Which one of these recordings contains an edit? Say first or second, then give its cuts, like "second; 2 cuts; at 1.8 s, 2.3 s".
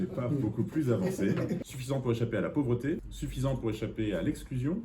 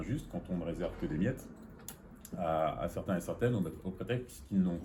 first; 2 cuts; at 1.7 s, 3.2 s